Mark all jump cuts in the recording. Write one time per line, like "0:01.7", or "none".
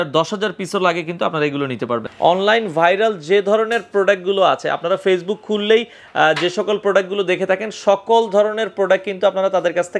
0:02.1